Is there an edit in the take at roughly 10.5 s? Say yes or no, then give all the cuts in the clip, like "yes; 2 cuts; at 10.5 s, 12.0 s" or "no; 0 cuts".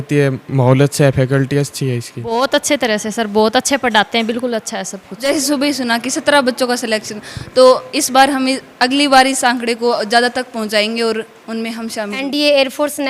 no; 3 cuts; at 2.3 s, 5.3 s, 12.2 s